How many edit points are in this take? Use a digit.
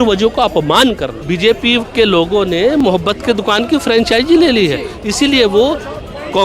1